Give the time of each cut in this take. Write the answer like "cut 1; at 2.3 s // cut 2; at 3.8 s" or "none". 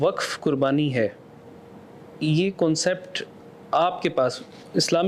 none